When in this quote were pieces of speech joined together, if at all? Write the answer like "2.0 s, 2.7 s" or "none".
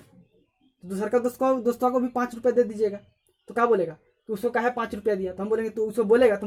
none

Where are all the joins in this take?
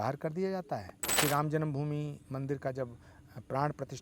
1.0 s

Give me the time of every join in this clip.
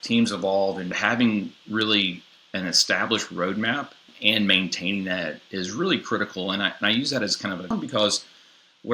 0.9 s, 4.1 s, 7.7 s

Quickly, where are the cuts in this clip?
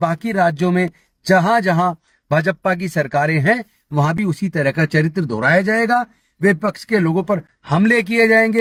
none

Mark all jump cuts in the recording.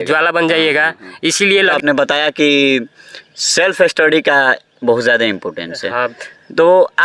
1.7 s

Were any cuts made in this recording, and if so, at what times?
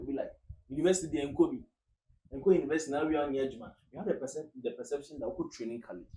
none

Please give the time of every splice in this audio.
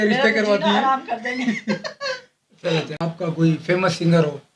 2.9 s

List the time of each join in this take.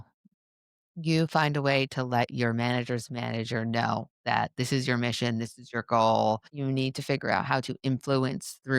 6.5 s

